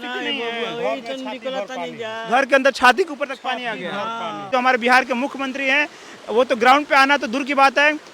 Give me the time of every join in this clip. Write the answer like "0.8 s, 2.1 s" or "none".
4.4 s